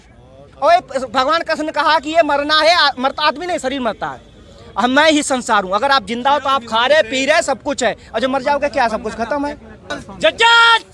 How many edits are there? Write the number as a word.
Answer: zero